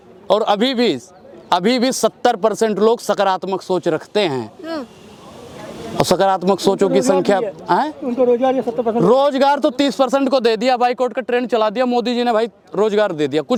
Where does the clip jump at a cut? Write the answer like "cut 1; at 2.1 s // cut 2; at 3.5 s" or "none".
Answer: none